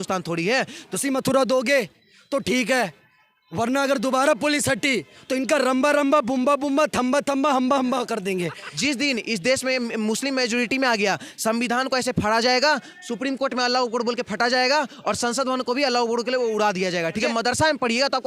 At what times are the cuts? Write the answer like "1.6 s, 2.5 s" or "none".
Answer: 1.0 s, 8.6 s, 17.2 s